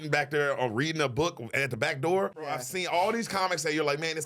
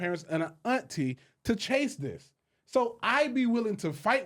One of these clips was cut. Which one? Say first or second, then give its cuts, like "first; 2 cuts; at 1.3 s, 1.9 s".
first; 1 cut; at 2.6 s